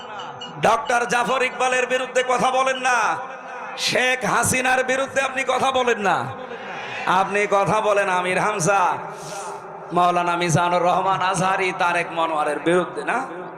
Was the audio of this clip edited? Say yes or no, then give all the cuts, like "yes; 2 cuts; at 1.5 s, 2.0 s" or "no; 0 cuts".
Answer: no; 0 cuts